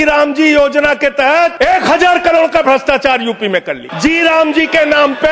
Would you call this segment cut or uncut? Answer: cut